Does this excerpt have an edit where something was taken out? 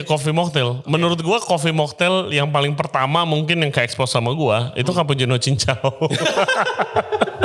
no; 0 cuts

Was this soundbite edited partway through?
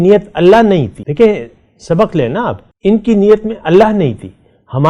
yes; 2 cuts; at 1.0 s, 2.7 s

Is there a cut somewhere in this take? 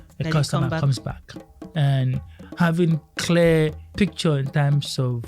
yes; 2 cuts; at 1.6 s, 3.9 s

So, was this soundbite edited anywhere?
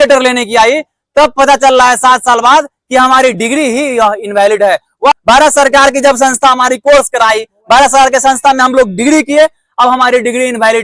yes; 1 cut; at 5.1 s

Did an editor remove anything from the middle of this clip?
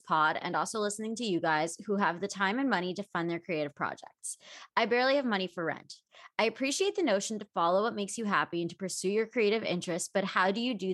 no; 0 cuts

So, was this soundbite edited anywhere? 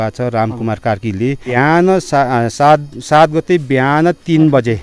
yes; 1 cut; at 1.5 s

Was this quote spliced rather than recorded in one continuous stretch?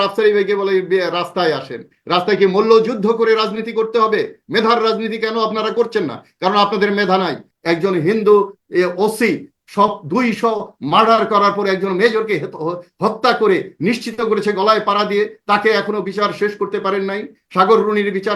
yes; 1 cut; at 7.5 s

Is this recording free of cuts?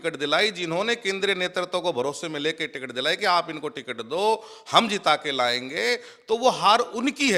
yes; 0 cuts

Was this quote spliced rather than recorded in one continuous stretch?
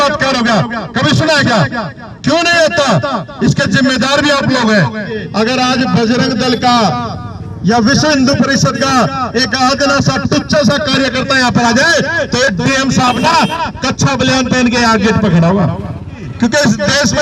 yes; 2 cuts; at 5.2 s, 16.2 s

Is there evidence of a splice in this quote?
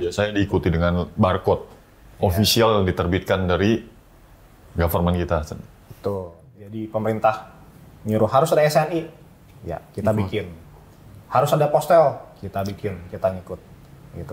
yes; 1 cut; at 6.5 s

